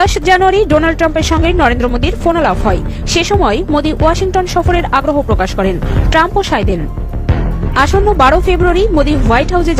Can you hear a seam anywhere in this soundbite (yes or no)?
no